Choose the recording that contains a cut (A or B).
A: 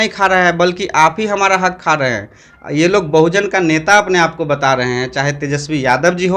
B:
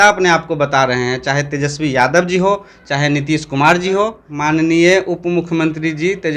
B